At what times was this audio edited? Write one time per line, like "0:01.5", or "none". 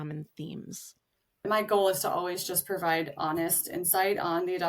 0:01.5

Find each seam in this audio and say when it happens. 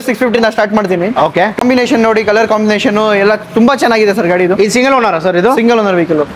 0:01.6

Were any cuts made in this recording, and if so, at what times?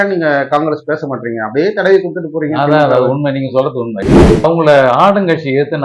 0:04.1

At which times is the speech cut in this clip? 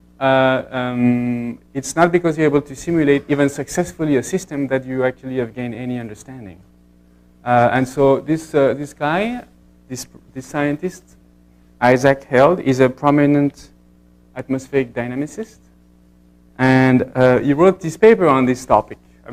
none

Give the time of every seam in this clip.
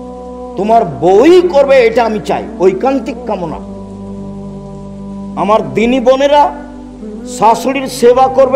none

